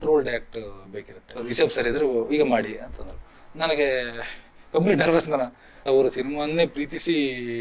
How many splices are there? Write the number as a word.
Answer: two